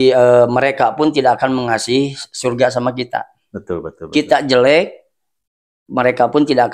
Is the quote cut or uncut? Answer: uncut